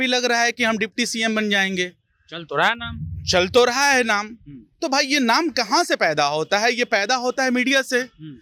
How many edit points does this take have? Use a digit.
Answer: 0